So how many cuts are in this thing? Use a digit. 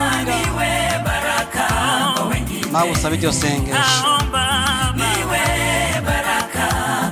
0